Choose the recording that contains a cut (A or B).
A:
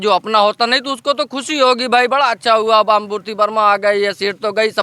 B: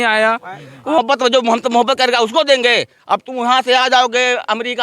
B